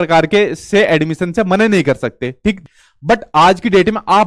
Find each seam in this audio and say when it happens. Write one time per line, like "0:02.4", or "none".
0:02.6